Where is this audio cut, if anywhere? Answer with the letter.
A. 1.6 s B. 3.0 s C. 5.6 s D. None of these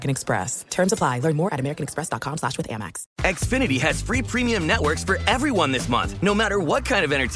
B